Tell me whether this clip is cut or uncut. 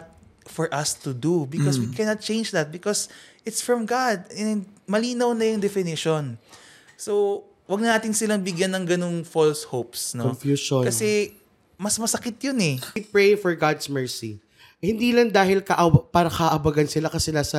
cut